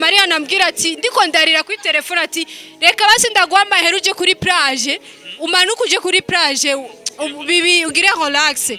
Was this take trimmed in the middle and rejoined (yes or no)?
no